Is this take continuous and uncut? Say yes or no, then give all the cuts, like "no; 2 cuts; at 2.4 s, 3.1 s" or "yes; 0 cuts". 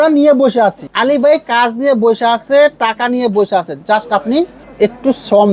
no; 2 cuts; at 0.9 s, 4.6 s